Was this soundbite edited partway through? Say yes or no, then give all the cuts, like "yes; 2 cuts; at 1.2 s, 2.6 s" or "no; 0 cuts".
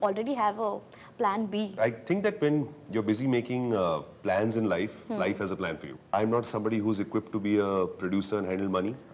yes; 2 cuts; at 1.7 s, 6.0 s